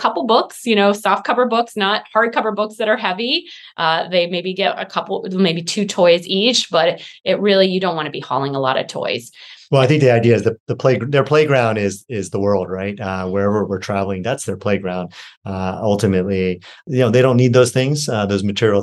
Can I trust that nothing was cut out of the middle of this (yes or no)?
yes